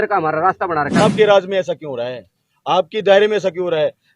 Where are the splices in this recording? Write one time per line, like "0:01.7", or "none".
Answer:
0:01.0

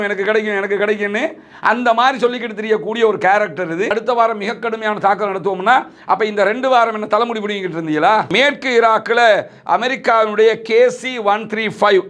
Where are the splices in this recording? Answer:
0:03.9
0:08.3

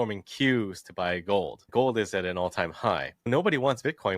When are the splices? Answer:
0:01.7
0:03.3

